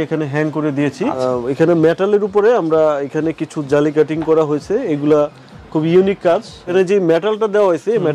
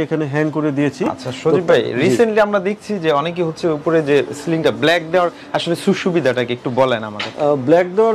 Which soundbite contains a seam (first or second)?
first